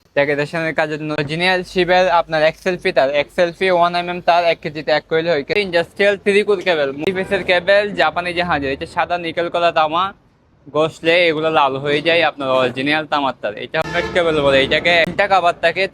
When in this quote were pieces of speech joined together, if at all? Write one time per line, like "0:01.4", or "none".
0:01.2
0:05.5
0:07.1
0:13.8
0:15.1